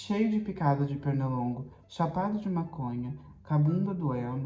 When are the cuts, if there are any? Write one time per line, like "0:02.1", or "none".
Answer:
none